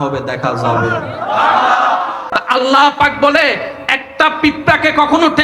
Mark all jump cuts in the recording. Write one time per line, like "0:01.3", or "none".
0:02.1